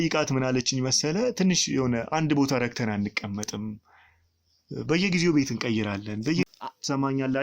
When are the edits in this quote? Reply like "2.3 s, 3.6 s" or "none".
6.5 s